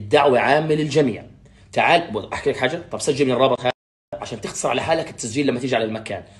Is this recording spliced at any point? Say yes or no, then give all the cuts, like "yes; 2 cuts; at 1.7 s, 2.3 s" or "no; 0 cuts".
yes; 1 cut; at 4.1 s